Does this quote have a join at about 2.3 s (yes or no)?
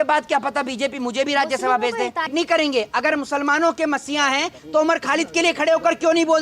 yes